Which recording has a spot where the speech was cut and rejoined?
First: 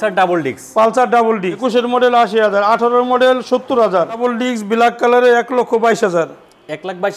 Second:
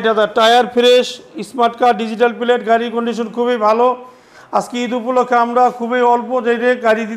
first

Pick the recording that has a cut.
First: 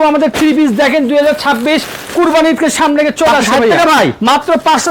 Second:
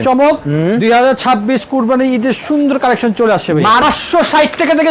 second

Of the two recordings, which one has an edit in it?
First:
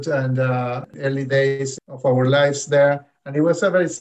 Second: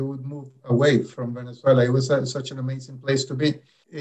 first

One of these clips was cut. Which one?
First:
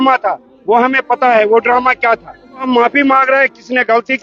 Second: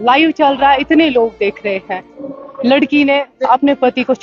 first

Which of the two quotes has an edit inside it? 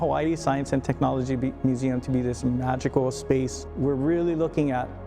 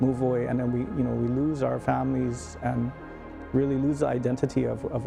first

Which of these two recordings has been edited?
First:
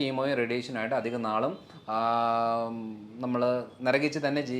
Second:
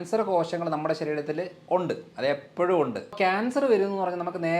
second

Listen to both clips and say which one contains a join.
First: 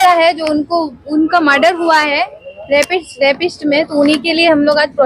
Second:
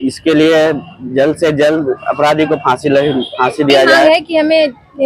second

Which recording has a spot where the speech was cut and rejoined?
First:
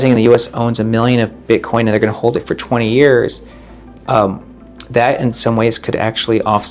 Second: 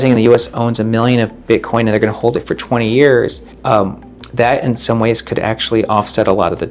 second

